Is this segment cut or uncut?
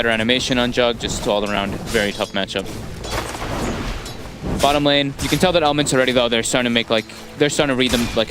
cut